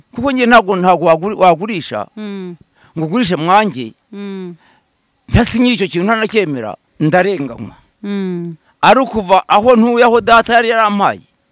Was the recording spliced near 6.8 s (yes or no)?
yes